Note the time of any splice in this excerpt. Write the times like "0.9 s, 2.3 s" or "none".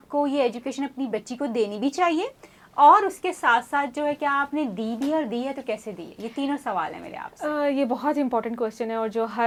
none